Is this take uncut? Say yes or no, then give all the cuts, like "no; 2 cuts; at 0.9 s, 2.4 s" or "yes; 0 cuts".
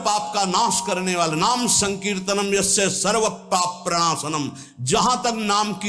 yes; 0 cuts